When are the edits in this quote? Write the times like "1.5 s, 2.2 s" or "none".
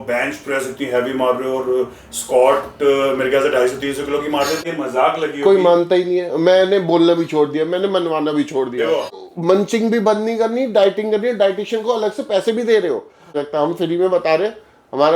4.6 s, 9.1 s, 13.4 s